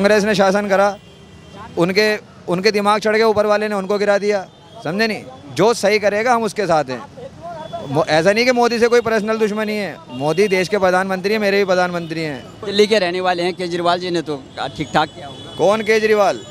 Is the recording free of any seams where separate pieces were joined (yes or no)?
yes